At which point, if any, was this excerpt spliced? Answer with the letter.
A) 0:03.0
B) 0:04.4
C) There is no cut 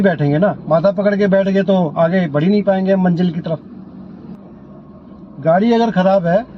B